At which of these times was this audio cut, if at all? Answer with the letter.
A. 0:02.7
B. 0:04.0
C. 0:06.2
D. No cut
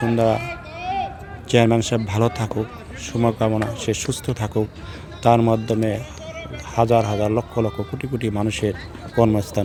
D